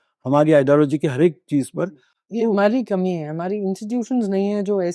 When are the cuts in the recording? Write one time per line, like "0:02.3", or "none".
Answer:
none